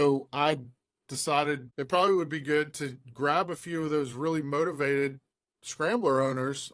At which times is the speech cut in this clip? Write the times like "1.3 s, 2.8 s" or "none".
1.7 s